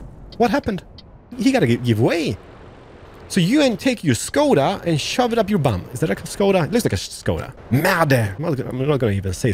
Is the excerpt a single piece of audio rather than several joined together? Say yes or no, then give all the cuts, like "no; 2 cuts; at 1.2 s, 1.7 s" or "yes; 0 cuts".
no; 3 cuts; at 1.4 s, 7.5 s, 8.3 s